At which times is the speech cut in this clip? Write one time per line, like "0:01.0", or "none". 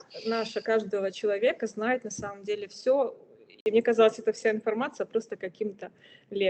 0:03.6